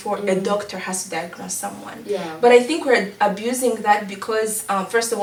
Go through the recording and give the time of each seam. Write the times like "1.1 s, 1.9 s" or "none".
none